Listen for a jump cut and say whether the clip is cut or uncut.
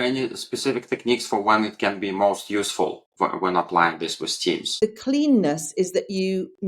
cut